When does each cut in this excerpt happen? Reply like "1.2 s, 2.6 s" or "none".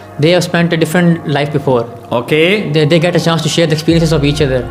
none

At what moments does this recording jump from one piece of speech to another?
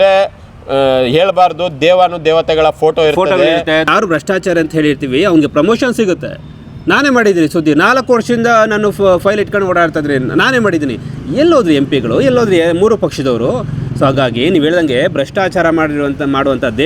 3.9 s

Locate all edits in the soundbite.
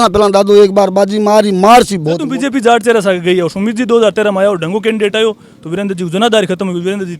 2.3 s

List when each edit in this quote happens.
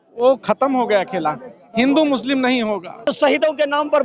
3.1 s

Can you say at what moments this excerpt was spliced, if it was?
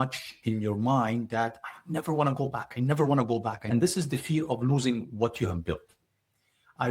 3.6 s

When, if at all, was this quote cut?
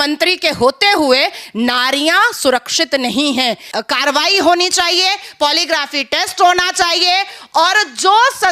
3.7 s

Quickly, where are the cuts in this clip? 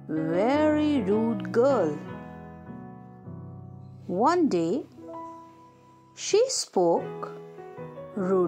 none

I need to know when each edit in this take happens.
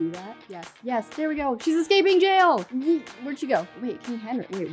3.7 s

